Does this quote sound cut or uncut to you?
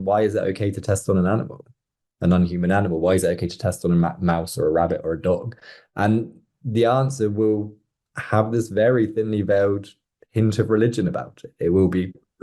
uncut